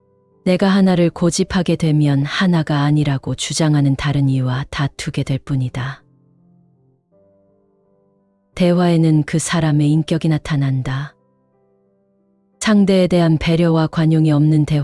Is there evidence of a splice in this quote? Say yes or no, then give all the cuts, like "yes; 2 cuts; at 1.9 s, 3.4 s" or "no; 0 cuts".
no; 0 cuts